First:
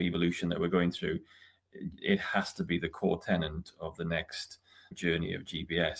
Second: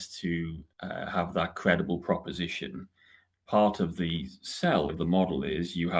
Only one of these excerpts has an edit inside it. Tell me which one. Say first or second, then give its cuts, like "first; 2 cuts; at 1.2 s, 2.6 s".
second; 1 cut; at 4.9 s